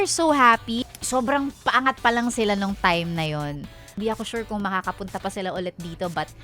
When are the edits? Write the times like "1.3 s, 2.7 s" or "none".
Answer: 1.0 s, 4.0 s